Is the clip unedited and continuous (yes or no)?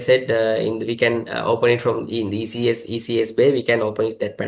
yes